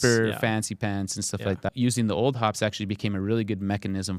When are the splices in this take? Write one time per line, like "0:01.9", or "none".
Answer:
0:01.7